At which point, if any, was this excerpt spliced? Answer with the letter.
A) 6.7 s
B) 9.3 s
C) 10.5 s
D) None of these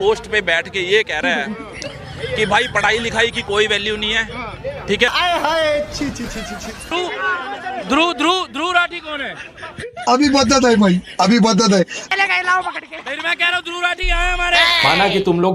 D